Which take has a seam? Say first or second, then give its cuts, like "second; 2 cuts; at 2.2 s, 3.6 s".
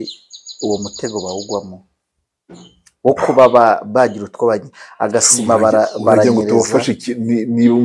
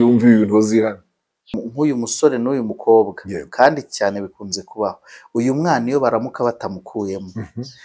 second; 1 cut; at 1.6 s